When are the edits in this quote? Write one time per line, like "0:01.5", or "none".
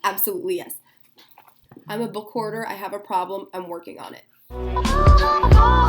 0:04.7